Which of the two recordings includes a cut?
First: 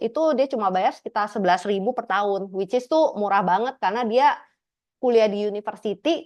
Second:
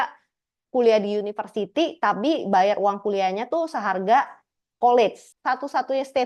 second; 1 cut; at 5.3 s

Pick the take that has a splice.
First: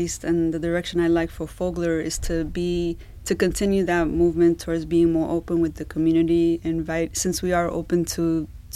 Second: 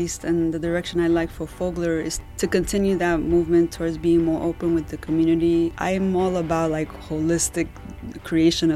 second; 2 cuts; at 2.2 s, 5.7 s

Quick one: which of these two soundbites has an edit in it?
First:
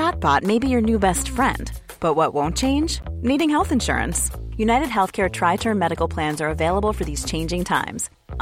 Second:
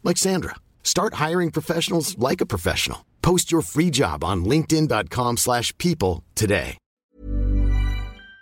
second; 1 cut; at 6.9 s

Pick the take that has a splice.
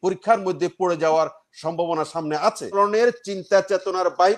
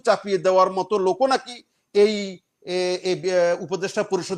first; 1 cut; at 2.7 s

